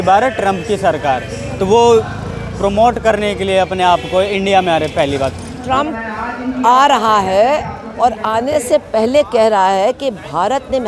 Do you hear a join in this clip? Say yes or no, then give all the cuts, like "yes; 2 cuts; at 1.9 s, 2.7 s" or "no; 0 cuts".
yes; 1 cut; at 5.6 s